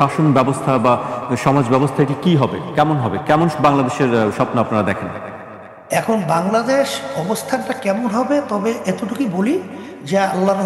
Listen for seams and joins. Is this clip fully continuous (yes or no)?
yes